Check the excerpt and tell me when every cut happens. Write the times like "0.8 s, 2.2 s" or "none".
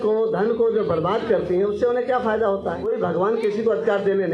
2.8 s